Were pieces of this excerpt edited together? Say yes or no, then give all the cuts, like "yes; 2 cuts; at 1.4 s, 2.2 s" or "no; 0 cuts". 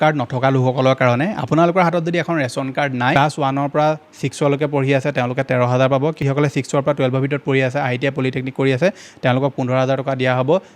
yes; 1 cut; at 3.1 s